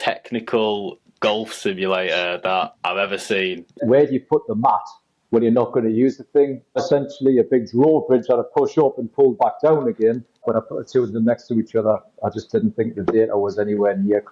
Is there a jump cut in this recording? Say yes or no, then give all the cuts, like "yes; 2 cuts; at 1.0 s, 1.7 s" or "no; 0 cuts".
yes; 3 cuts; at 3.8 s, 6.8 s, 10.4 s